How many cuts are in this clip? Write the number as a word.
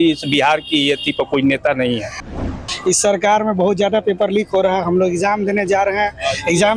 one